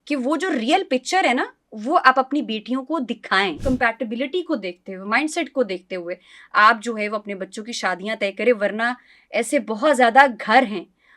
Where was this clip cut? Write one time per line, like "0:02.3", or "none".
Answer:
0:03.6